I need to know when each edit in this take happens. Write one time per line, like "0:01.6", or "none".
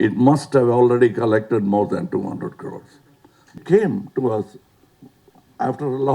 0:03.6